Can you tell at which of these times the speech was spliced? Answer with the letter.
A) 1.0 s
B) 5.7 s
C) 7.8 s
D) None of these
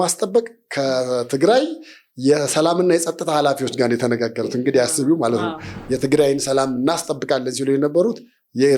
B